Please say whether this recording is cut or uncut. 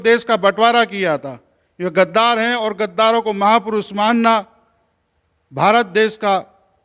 uncut